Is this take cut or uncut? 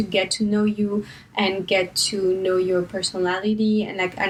uncut